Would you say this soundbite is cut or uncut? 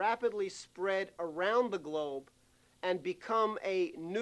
cut